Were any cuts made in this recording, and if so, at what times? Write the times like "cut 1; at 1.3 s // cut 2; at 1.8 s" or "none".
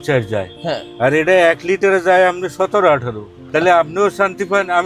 cut 1; at 3.5 s